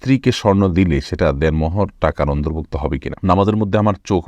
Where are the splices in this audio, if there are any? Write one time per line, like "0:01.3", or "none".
0:03.1

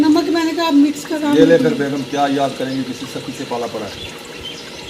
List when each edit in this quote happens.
0:01.2

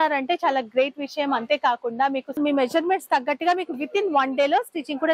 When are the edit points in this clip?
0:02.4

